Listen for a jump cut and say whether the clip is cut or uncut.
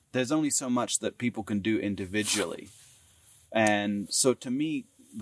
uncut